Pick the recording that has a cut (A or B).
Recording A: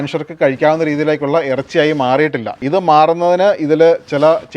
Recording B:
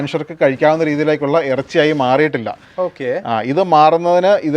A